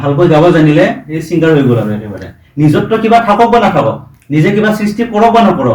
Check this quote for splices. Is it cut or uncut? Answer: uncut